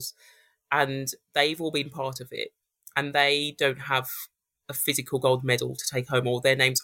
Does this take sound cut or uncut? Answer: uncut